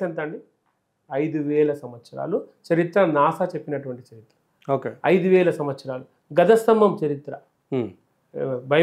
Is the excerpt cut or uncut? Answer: uncut